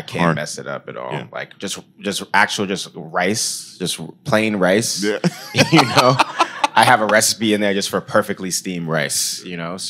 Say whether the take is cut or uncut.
uncut